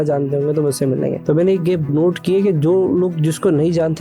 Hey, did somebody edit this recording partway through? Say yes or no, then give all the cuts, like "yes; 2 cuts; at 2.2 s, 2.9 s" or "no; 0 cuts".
yes; 2 cuts; at 1.2 s, 1.9 s